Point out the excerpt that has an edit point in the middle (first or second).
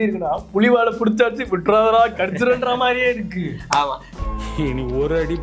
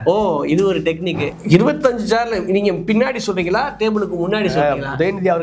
second